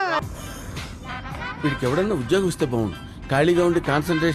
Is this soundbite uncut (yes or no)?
yes